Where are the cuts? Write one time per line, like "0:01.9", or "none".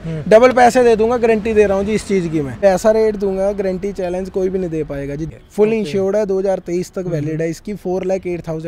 0:02.6
0:05.2